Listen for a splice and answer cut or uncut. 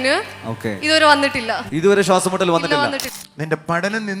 cut